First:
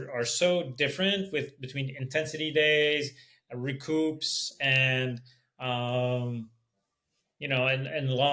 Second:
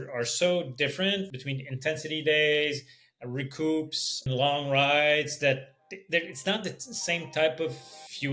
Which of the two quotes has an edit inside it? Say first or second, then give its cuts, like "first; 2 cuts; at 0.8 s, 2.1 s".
second; 2 cuts; at 1.3 s, 4.3 s